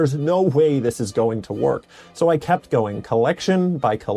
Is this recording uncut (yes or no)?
yes